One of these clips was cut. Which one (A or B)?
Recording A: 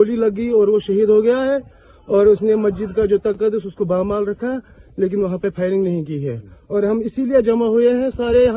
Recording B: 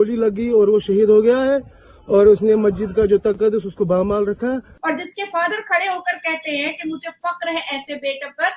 B